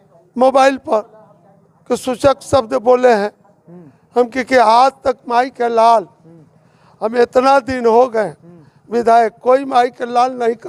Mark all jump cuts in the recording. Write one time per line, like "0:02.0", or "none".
none

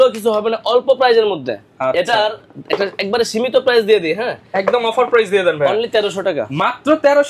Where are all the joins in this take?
none

